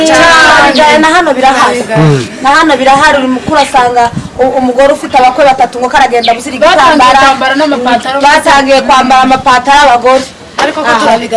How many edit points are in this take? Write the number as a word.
zero